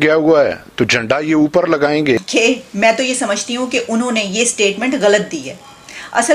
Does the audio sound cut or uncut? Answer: cut